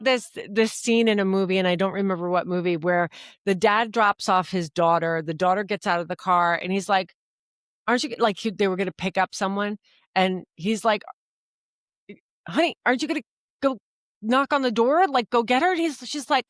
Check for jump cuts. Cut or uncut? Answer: uncut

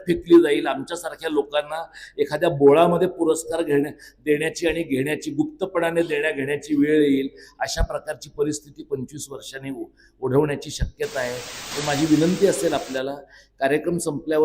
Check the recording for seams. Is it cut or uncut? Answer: cut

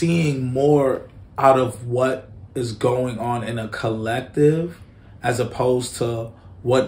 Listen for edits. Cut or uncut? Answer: uncut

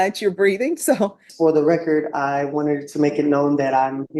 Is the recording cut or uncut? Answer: cut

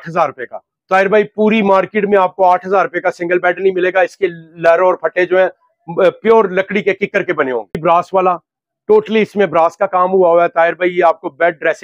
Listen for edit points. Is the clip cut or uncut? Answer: uncut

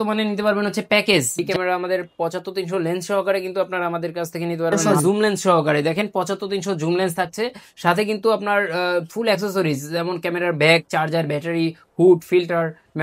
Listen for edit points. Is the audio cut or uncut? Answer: cut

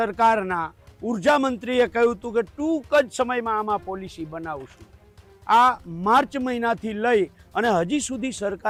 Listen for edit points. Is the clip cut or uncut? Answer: uncut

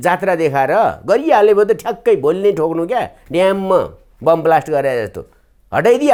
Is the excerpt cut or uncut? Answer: uncut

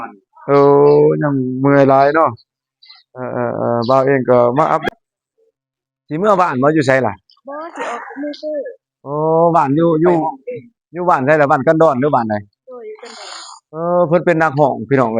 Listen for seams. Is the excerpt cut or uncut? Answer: cut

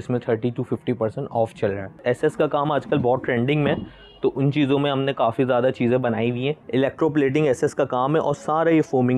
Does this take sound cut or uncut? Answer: cut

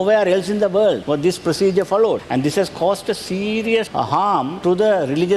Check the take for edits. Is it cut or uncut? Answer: cut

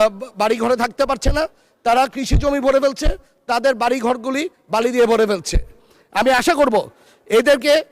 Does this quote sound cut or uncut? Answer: uncut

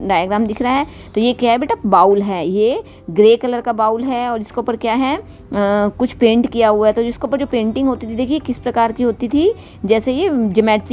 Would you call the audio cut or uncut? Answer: uncut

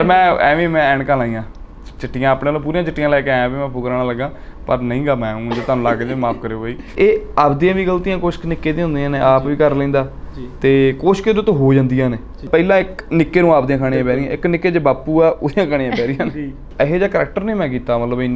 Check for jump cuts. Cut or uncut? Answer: cut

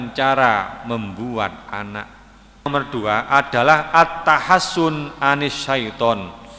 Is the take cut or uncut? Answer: cut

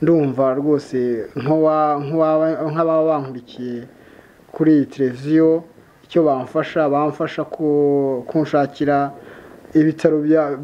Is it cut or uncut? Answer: uncut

